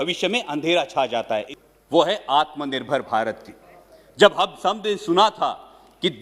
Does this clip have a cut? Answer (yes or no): yes